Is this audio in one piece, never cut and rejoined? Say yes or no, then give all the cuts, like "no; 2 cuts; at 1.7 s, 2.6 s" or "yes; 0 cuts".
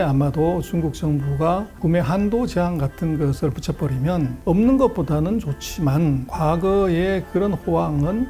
no; 1 cut; at 3.5 s